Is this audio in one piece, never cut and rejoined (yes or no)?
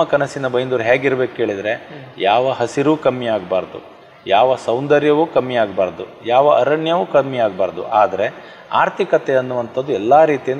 yes